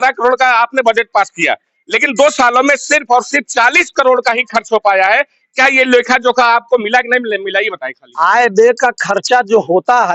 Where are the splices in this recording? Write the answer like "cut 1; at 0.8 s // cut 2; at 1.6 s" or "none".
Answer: none